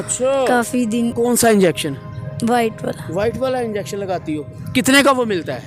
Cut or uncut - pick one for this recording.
cut